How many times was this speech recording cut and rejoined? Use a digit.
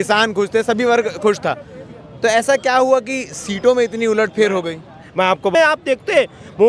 1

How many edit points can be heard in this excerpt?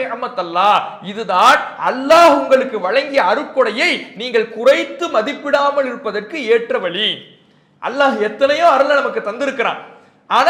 0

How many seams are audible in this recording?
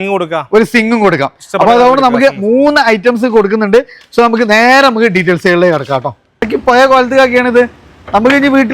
1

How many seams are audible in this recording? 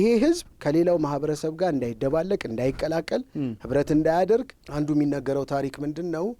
1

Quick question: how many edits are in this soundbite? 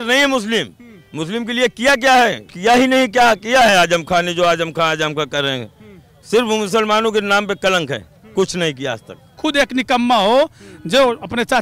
2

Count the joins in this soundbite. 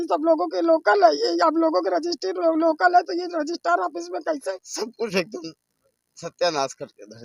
1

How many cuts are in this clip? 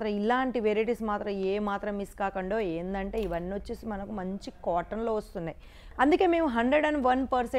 1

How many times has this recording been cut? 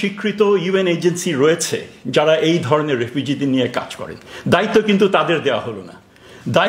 0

